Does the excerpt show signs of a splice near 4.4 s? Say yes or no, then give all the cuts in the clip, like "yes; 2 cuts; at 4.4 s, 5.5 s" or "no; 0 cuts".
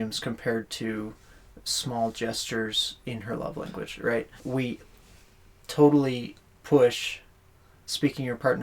yes; 1 cut; at 4.4 s